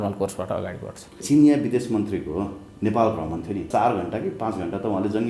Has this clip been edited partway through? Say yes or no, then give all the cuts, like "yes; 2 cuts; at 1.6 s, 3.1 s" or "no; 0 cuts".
yes; 2 cuts; at 1.2 s, 3.7 s